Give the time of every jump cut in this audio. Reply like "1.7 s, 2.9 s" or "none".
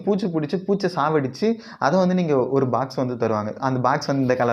none